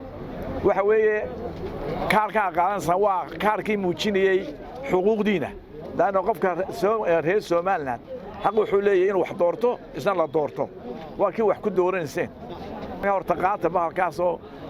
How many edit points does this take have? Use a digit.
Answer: 1